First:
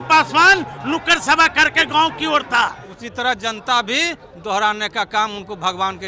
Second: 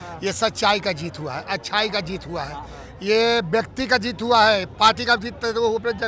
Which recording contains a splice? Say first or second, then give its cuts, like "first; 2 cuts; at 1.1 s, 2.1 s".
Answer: first; 1 cut; at 2.9 s